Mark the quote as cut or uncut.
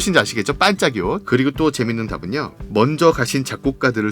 cut